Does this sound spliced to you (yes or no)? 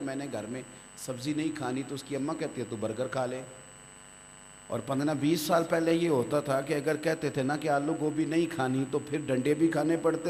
no